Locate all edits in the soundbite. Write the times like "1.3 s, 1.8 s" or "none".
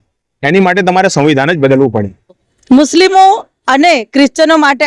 2.5 s